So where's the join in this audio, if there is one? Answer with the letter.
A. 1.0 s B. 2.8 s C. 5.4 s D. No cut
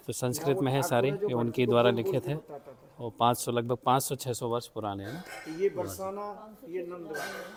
D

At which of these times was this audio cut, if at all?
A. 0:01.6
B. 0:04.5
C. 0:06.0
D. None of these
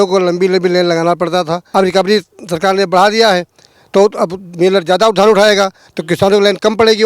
A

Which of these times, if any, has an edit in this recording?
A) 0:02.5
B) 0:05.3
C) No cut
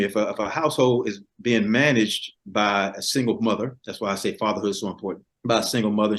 B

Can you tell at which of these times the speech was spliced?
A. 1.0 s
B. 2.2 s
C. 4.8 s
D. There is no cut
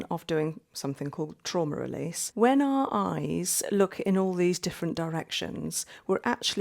B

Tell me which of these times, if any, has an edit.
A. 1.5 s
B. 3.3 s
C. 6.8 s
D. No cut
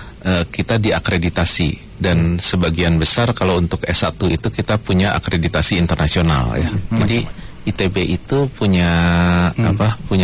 C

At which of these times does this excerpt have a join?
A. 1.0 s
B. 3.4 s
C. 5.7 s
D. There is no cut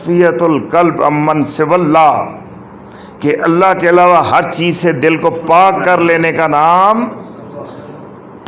D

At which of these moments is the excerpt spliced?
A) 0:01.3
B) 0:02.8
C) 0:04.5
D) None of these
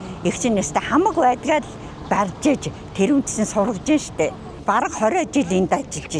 C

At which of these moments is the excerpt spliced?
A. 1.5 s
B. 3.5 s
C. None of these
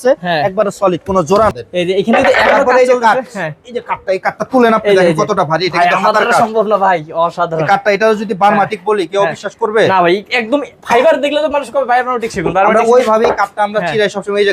A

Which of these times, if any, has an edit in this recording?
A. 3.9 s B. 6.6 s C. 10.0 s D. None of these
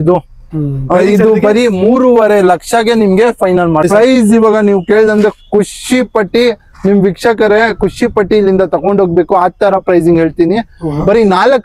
A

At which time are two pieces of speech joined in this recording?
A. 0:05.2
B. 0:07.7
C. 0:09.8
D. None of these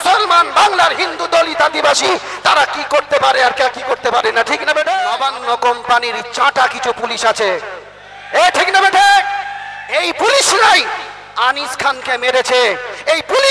A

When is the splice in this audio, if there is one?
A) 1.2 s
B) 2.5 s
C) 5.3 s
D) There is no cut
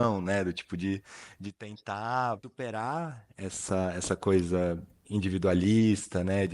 B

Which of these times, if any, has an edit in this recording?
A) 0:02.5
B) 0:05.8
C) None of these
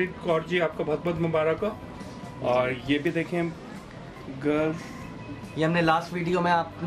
C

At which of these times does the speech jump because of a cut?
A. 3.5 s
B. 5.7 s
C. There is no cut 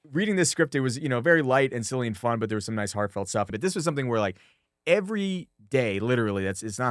A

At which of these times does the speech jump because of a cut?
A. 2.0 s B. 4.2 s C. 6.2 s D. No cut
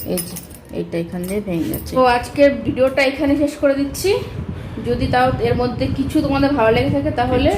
A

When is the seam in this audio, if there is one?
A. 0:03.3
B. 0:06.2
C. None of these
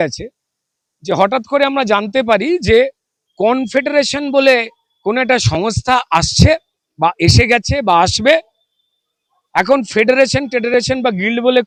C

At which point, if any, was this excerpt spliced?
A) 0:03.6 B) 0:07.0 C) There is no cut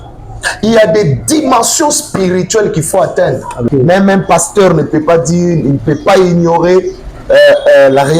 A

